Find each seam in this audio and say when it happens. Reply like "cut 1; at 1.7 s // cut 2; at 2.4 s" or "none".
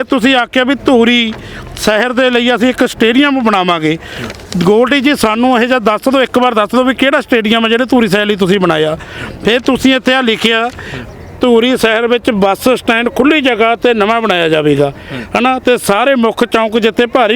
none